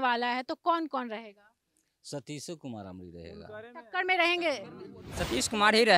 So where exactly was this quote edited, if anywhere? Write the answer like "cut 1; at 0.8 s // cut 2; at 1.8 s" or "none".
cut 1; at 4.9 s